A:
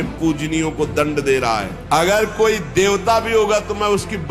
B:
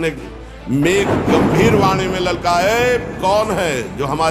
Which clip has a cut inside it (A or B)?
A